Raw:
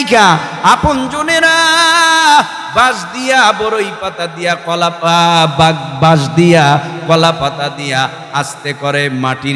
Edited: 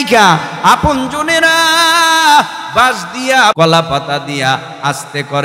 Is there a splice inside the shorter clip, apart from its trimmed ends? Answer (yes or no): yes